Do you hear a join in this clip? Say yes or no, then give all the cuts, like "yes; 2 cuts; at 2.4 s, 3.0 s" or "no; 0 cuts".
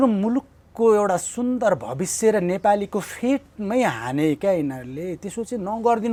no; 0 cuts